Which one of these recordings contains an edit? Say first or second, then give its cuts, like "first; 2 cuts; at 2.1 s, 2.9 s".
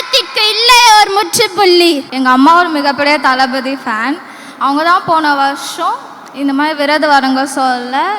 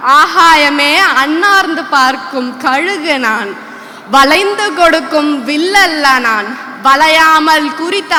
first; 1 cut; at 2.1 s